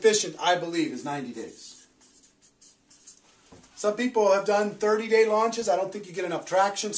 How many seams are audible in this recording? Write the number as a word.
one